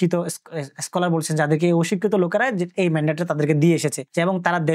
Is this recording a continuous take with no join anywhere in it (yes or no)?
yes